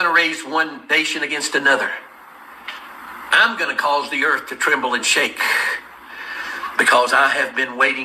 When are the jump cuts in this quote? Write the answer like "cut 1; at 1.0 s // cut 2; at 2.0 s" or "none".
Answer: cut 1; at 2.5 s // cut 2; at 5.7 s